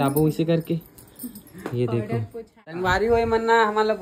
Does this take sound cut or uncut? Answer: cut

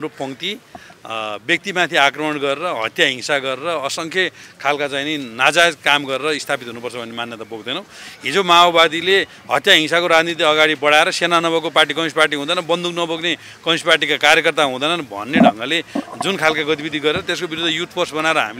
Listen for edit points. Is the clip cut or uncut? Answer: uncut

